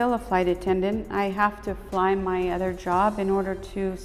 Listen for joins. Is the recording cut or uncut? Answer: uncut